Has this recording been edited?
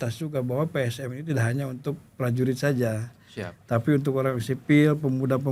no; 0 cuts

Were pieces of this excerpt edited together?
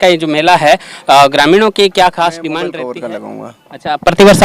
yes; 1 cut; at 2.7 s

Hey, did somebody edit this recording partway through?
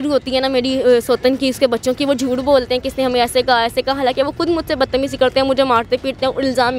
no; 0 cuts

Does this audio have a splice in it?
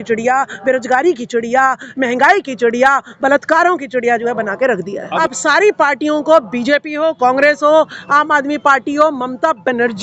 yes; 1 cut; at 5.1 s

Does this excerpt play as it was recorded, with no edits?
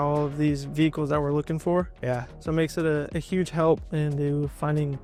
yes; 0 cuts

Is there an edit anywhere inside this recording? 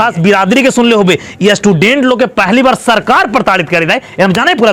no; 0 cuts

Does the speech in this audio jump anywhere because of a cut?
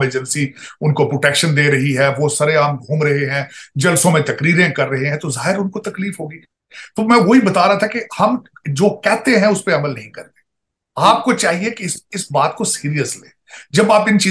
no; 0 cuts

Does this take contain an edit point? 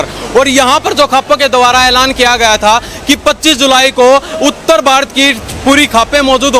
no; 0 cuts

